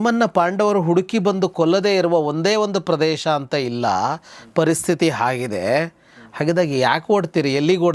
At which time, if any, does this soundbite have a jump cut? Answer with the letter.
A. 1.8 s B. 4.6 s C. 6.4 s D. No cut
D